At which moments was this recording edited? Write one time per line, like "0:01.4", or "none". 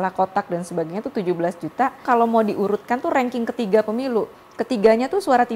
0:02.0
0:04.3